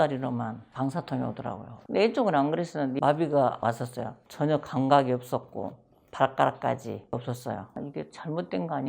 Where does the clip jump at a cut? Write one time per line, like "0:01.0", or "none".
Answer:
0:03.0
0:03.6
0:07.8